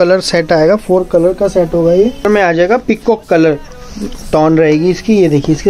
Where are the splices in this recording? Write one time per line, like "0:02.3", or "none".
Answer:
0:02.3